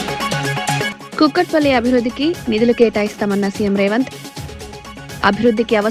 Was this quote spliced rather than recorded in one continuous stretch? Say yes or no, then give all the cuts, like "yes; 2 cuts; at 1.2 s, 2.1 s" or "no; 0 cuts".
yes; 1 cut; at 1.0 s